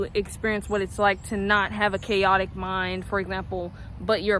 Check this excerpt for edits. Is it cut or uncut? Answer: uncut